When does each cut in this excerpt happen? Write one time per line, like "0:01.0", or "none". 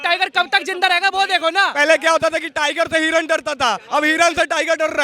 0:01.7